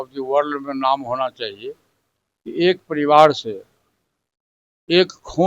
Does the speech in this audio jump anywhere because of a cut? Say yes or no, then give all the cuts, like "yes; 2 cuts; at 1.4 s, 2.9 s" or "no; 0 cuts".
no; 0 cuts